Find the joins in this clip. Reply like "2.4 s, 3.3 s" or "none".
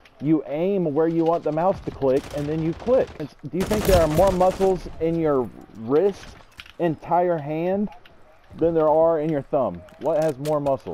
3.4 s